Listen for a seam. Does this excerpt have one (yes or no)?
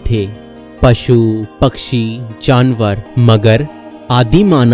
yes